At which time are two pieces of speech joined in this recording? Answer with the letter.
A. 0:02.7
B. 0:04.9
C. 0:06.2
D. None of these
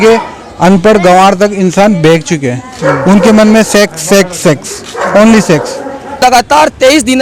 C